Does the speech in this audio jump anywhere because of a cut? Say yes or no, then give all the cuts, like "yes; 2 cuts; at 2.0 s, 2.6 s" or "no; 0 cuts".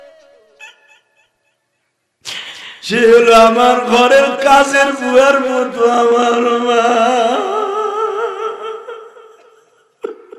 no; 0 cuts